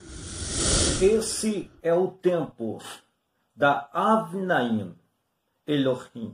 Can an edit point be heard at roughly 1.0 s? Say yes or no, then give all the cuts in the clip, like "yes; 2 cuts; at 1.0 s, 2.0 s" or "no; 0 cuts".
yes; 1 cut; at 1.0 s